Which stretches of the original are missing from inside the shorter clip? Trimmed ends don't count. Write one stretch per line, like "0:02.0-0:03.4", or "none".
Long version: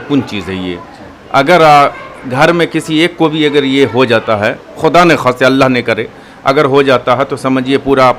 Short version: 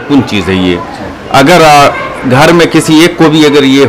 none